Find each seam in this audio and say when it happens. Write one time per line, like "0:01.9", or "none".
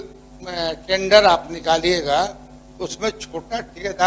none